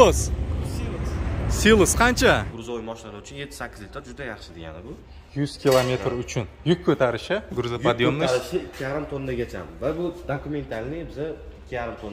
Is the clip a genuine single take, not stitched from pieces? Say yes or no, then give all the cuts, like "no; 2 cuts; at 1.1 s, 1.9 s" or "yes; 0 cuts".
no; 1 cut; at 2.4 s